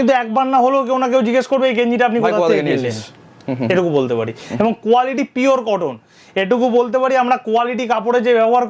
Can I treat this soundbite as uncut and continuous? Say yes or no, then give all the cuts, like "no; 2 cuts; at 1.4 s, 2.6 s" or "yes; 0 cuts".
yes; 0 cuts